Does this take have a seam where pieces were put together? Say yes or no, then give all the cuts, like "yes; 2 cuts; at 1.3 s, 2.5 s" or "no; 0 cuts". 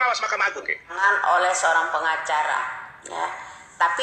yes; 1 cut; at 0.9 s